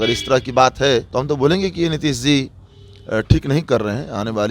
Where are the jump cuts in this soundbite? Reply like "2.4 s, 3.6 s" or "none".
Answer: 1.1 s